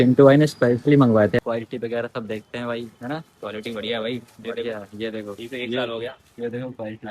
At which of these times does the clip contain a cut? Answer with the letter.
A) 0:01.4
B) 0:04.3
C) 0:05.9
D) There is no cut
A